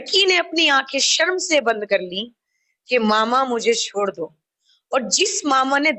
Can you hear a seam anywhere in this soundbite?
no; 0 cuts

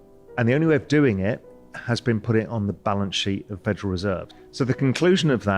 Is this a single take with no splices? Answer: no; 1 cut; at 4.3 s

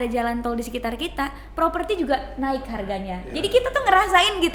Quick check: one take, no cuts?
yes; 0 cuts

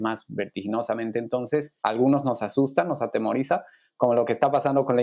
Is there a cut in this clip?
yes; 1 cut; at 1.7 s

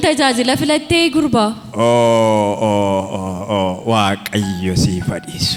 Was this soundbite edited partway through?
no; 0 cuts

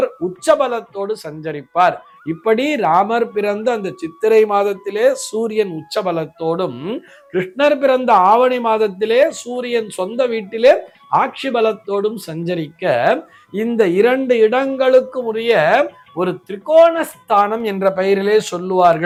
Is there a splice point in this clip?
no; 0 cuts

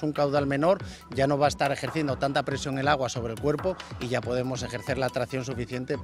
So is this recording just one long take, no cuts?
yes; 0 cuts

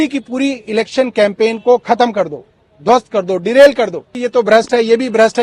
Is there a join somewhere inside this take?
yes; 1 cut; at 4.2 s

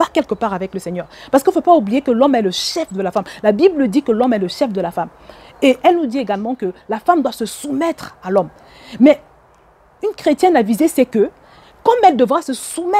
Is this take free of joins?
yes; 0 cuts

